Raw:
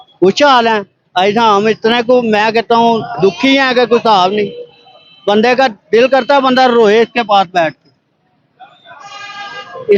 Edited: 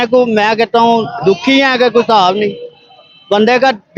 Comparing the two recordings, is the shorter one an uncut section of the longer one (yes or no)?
yes